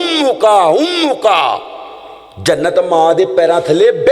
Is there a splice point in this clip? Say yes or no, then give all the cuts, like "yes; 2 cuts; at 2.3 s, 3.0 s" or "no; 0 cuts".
no; 0 cuts